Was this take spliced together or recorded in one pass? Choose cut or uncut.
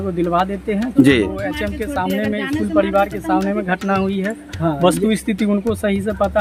uncut